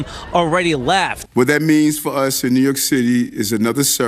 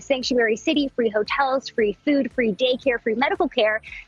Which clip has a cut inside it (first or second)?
first